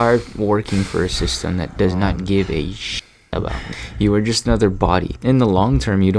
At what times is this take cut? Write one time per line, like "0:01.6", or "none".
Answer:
0:01.7
0:03.4
0:05.1